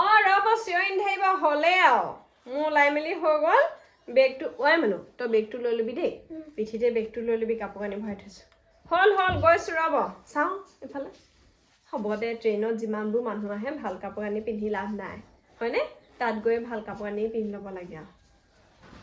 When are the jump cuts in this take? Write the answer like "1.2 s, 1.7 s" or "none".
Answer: none